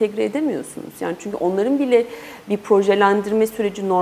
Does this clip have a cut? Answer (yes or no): no